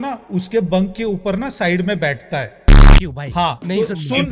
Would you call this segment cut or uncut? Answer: uncut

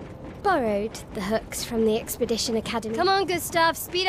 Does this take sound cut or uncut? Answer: cut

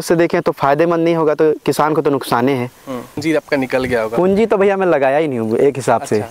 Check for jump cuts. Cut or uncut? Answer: cut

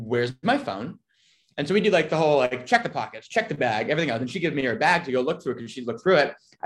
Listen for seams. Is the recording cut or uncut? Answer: uncut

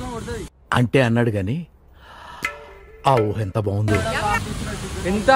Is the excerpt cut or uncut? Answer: uncut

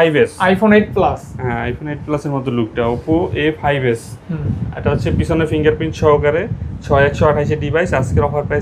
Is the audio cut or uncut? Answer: uncut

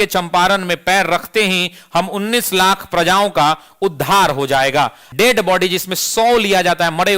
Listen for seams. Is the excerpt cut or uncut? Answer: cut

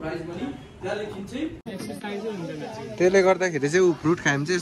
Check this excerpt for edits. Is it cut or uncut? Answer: cut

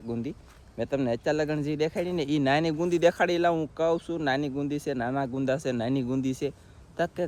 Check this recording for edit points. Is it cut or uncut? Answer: uncut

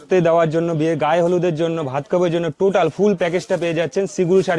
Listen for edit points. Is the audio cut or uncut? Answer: uncut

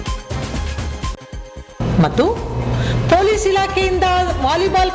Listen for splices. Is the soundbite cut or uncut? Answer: cut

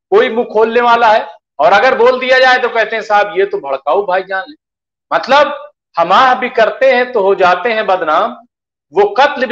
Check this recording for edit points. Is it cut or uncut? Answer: uncut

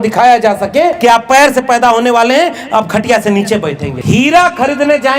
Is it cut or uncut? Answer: cut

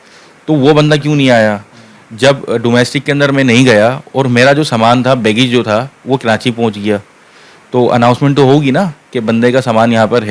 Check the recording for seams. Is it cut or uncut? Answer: uncut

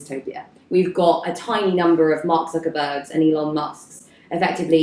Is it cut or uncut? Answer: uncut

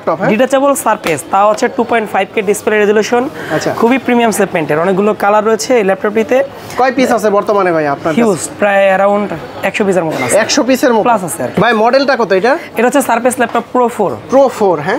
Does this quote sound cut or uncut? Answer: uncut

